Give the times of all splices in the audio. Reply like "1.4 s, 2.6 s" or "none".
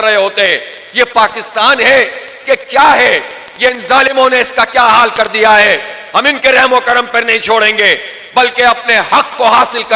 none